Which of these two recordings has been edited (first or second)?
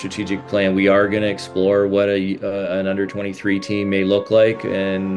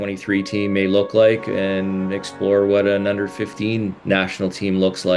second